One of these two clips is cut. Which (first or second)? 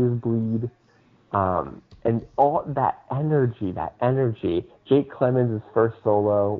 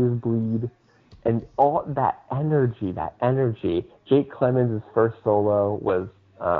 second